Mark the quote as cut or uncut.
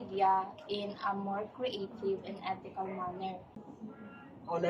cut